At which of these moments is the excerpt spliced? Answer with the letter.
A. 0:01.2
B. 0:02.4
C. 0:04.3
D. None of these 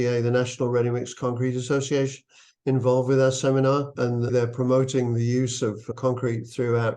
C